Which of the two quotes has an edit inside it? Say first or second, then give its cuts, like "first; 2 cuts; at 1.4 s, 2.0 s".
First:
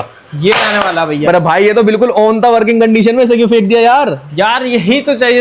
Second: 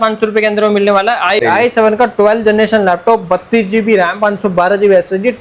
second; 1 cut; at 1.4 s